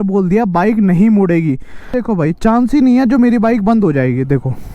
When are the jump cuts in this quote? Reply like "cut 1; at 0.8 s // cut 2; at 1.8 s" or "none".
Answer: cut 1; at 2.0 s